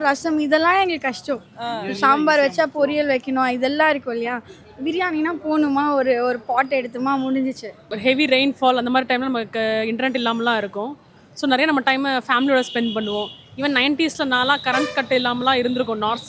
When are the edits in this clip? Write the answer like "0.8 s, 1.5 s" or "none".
7.9 s